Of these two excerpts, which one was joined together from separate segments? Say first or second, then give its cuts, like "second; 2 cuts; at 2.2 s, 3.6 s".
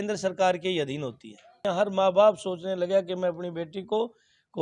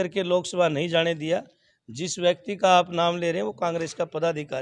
first; 1 cut; at 1.6 s